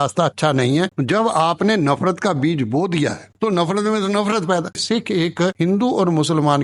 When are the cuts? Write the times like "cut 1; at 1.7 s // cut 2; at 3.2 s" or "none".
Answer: cut 1; at 0.9 s // cut 2; at 4.7 s